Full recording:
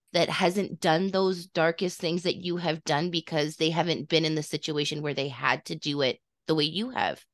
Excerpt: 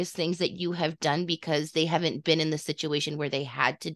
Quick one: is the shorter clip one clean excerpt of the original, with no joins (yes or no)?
yes